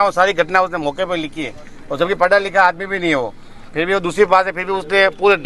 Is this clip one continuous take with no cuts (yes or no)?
yes